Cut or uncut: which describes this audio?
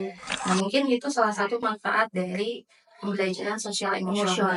uncut